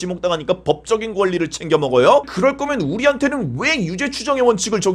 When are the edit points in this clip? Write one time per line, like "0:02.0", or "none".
0:02.2